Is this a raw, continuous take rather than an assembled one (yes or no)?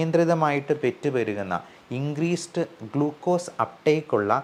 yes